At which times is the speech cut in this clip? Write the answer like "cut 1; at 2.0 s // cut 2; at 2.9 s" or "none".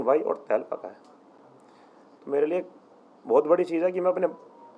none